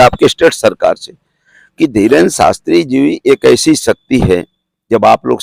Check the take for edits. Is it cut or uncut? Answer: uncut